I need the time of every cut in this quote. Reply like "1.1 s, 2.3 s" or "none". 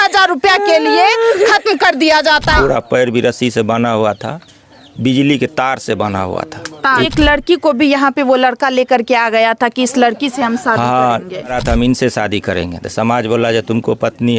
2.5 s, 7.1 s, 11.6 s